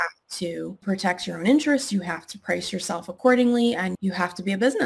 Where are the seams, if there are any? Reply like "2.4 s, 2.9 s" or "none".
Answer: 0.8 s, 3.9 s